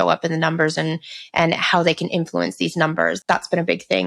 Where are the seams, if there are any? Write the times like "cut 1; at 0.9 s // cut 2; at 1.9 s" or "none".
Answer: cut 1; at 3.2 s